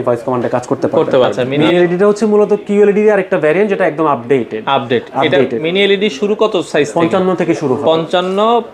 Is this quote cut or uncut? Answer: cut